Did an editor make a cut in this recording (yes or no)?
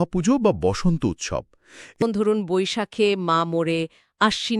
yes